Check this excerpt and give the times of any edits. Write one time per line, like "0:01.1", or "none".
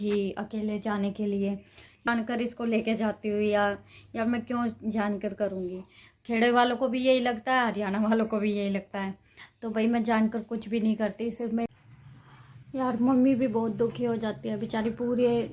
0:02.1
0:11.7